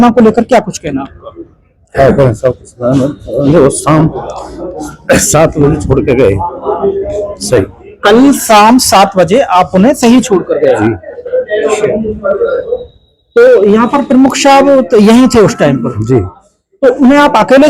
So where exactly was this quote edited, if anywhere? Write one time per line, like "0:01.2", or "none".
none